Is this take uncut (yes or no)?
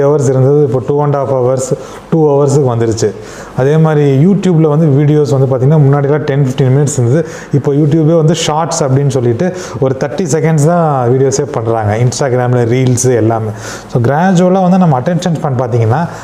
yes